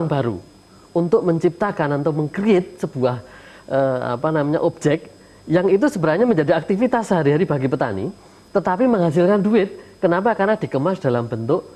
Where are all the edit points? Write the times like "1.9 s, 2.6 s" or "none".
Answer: none